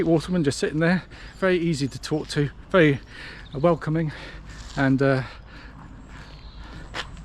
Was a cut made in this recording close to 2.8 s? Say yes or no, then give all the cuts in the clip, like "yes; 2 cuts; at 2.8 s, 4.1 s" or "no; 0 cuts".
no; 0 cuts